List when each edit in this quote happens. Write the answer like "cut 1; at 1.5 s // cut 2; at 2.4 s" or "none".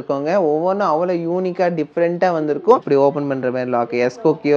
cut 1; at 2.8 s